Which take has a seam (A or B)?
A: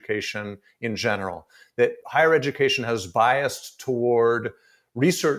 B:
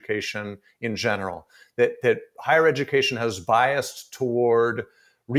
A